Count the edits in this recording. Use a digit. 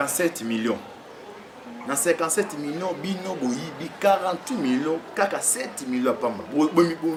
0